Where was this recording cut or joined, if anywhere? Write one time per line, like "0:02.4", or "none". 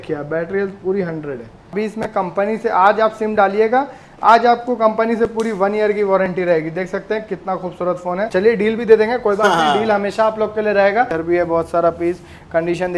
0:01.7
0:08.3
0:11.1